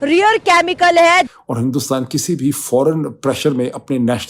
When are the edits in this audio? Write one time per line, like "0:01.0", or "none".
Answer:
0:01.4

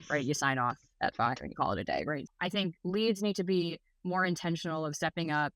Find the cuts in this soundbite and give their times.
0:02.2

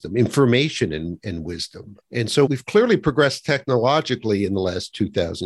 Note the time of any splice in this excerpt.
0:02.5

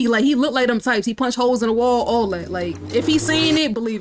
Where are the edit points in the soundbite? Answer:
0:02.8

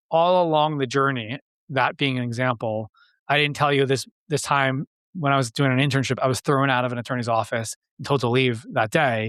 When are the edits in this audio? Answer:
none

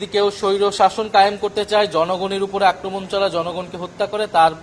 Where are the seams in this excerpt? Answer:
none

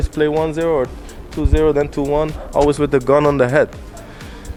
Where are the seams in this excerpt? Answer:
none

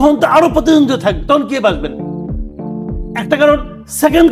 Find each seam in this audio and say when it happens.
0:01.9
0:03.2

